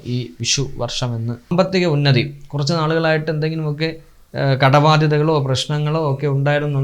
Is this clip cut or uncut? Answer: cut